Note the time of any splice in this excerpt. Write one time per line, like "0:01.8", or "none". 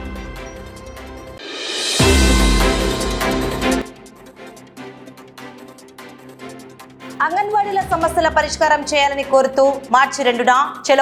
none